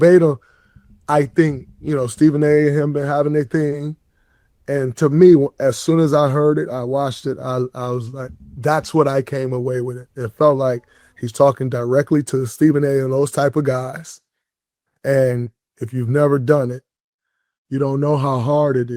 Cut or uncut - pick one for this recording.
uncut